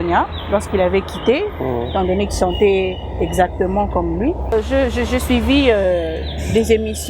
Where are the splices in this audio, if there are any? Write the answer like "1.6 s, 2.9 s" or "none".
4.5 s